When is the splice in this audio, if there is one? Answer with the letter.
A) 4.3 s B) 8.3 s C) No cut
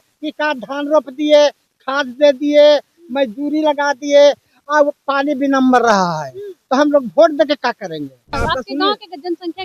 B